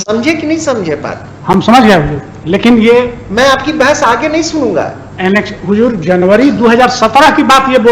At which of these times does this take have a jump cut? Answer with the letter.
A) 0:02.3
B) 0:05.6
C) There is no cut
C